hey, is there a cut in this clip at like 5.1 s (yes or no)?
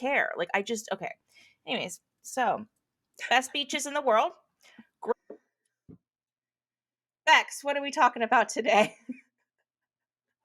yes